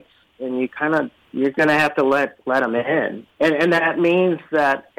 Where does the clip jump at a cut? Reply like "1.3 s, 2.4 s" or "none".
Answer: 1.2 s, 3.2 s